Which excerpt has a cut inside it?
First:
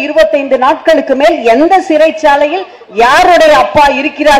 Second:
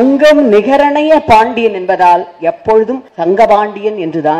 second; 1 cut; at 3.1 s

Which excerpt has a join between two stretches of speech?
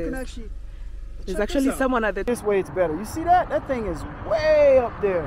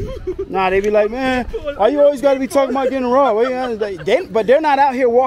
first; 1 cut; at 2.2 s

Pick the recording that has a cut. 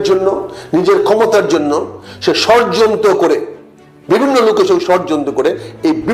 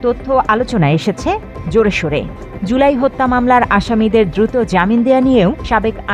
second; 1 cut; at 2.5 s

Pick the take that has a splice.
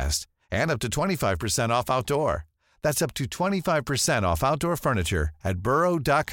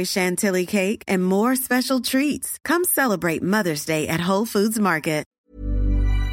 second; 1 cut; at 5.3 s

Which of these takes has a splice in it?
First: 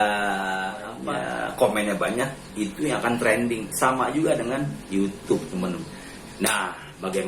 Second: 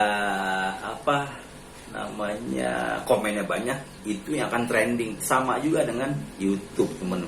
first; 1 cut; at 0.9 s

